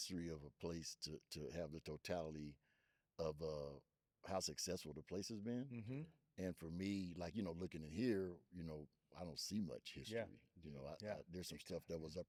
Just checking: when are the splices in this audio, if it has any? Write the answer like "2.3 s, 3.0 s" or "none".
none